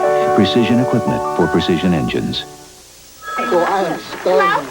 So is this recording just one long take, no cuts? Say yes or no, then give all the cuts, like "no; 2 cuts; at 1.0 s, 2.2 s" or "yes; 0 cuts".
no; 1 cut; at 2.9 s